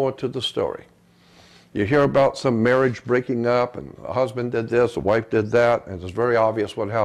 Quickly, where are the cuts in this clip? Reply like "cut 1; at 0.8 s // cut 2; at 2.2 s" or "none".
none

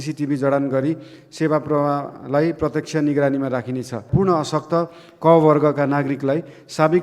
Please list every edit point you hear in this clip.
cut 1; at 4.1 s

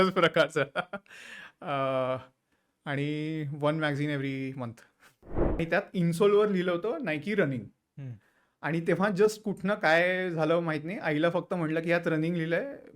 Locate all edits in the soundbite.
cut 1; at 5.6 s

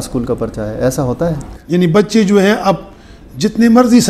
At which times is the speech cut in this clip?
cut 1; at 1.5 s

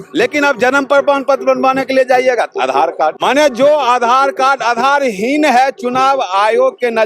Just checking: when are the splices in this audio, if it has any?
cut 1; at 3.2 s

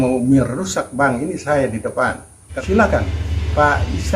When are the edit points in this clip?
cut 1; at 2.4 s

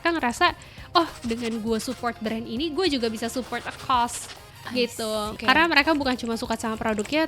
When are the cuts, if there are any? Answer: cut 1; at 5.3 s

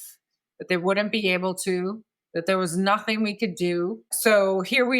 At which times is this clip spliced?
cut 1; at 4.1 s

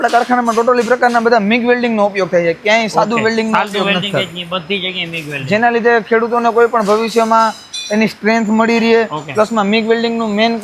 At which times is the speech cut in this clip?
none

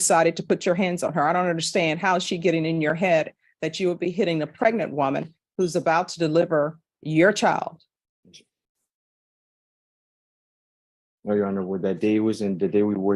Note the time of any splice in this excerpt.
none

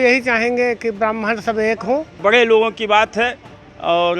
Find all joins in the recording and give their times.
cut 1; at 2.2 s

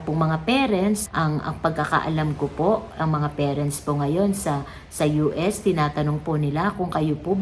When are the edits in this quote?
none

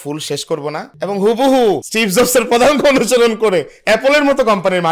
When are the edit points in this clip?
none

